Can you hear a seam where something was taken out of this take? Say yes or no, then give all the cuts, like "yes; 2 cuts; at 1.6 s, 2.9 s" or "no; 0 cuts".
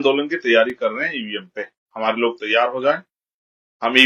no; 0 cuts